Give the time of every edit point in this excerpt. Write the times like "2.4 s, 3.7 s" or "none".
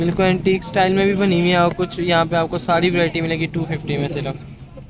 none